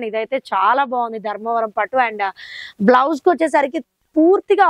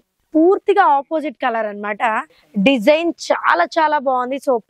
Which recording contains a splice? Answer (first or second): second